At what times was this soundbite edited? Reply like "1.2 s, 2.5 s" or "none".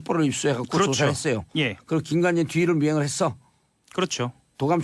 3.7 s